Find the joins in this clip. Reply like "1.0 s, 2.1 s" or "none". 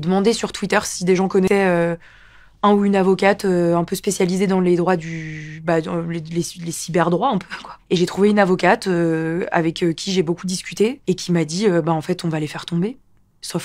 1.5 s